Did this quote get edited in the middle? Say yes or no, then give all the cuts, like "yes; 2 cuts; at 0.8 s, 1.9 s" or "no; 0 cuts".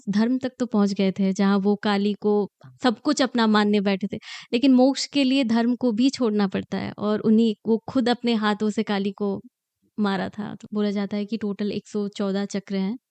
yes; 1 cut; at 10.6 s